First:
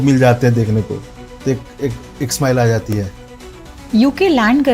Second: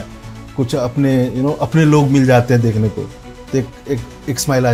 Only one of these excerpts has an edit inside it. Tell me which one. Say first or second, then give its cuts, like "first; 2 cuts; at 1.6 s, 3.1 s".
first; 1 cut; at 3.7 s